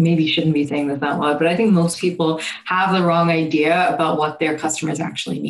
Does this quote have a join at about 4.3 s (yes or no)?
no